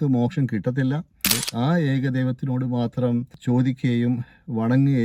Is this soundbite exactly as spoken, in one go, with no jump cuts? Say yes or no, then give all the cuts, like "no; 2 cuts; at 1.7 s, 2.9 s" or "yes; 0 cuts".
no; 2 cuts; at 1.4 s, 3.3 s